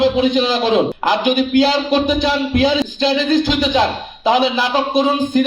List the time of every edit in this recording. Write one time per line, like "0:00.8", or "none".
0:02.9